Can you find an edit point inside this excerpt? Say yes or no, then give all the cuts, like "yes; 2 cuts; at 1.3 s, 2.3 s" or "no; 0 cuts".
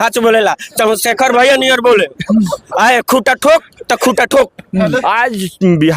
yes; 1 cut; at 5.0 s